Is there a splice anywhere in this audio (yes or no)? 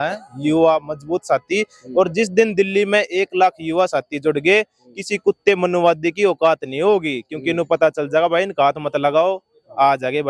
no